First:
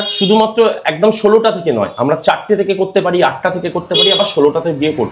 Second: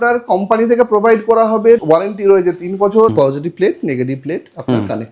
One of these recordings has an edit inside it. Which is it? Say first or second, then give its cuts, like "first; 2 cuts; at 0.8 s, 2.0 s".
second; 2 cuts; at 1.8 s, 3.1 s